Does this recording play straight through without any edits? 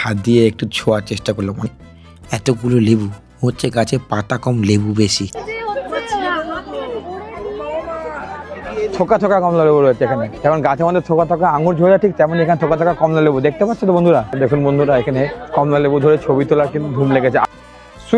no; 4 cuts; at 1.7 s, 5.3 s, 14.3 s, 17.5 s

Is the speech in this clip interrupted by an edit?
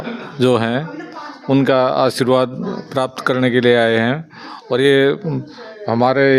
no; 0 cuts

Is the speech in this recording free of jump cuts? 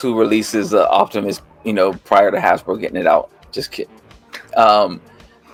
yes; 0 cuts

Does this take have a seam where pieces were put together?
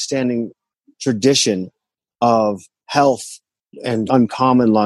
no; 0 cuts

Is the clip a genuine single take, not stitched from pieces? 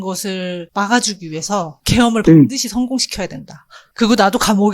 yes; 0 cuts

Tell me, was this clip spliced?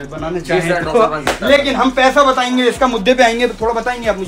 no; 0 cuts

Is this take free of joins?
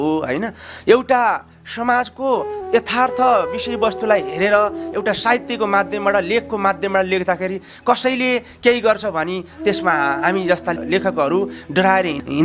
yes; 0 cuts

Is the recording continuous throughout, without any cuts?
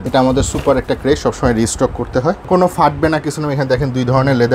no; 1 cut; at 2.4 s

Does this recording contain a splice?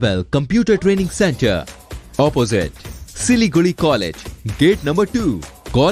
no; 0 cuts

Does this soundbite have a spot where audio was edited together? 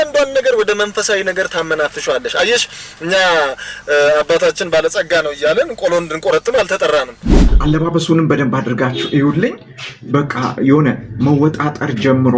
yes; 1 cut; at 7.5 s

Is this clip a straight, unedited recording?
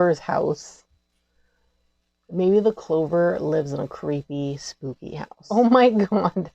no; 1 cut; at 5.4 s

